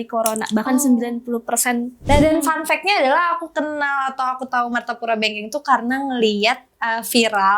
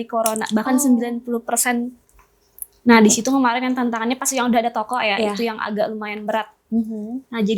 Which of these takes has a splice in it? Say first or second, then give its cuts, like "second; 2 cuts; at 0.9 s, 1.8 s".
first; 1 cut; at 1.9 s